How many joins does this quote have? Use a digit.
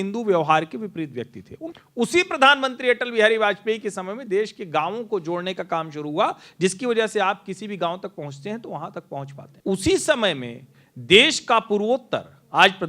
2